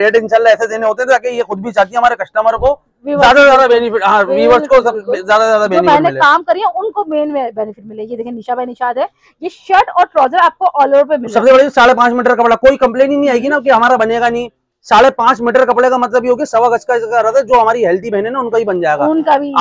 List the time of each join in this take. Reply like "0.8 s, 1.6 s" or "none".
none